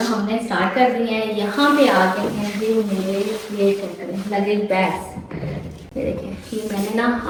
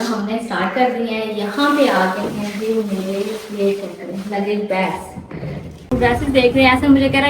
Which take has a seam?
second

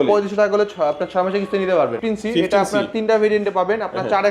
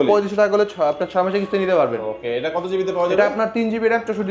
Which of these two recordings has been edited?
first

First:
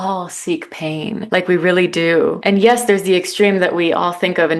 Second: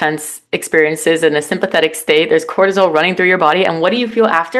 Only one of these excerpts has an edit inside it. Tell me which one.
first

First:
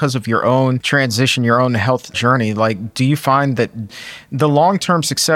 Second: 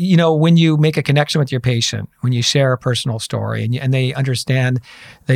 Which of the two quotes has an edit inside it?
first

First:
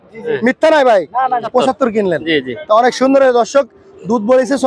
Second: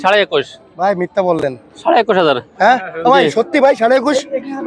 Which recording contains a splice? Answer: first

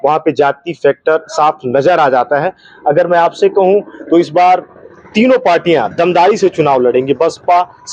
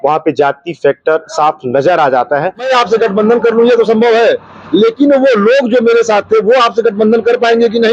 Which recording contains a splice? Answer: second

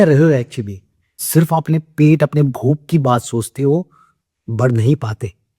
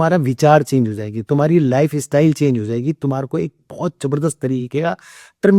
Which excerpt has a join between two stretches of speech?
first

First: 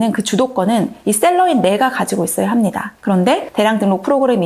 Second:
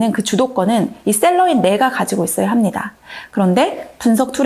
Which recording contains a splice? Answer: first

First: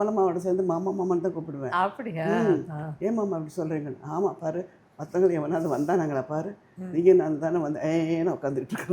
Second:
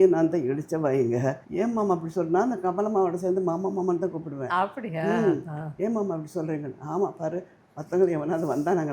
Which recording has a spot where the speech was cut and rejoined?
second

